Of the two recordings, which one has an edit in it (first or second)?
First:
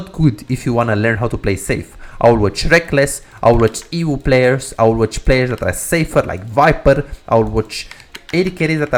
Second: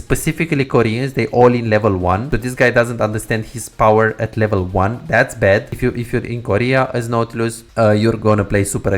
second